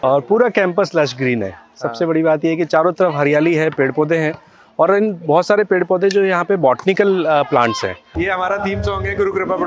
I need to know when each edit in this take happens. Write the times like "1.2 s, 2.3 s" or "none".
8.1 s